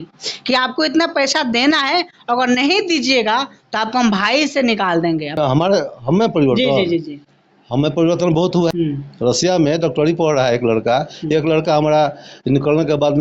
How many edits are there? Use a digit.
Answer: 2